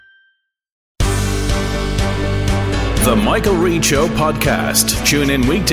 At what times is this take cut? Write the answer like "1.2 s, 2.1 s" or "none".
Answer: 0.9 s